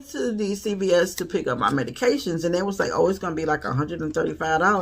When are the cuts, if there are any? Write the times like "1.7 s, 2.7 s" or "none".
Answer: none